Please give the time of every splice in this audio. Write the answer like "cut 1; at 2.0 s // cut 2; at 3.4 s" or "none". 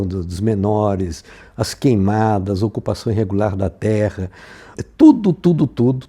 cut 1; at 4.8 s